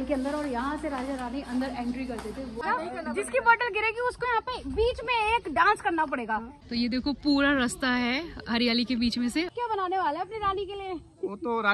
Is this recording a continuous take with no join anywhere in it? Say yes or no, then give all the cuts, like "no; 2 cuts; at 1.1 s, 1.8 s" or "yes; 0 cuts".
no; 3 cuts; at 2.6 s, 6.6 s, 9.6 s